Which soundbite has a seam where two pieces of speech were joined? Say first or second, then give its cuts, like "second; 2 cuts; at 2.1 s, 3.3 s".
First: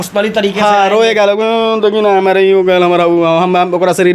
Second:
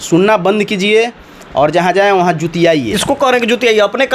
second; 1 cut; at 2.9 s